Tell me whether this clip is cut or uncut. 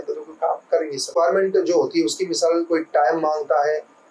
cut